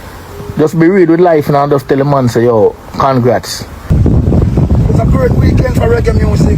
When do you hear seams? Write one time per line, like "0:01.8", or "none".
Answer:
0:03.9